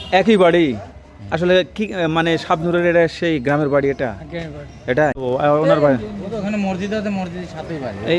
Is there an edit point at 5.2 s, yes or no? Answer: yes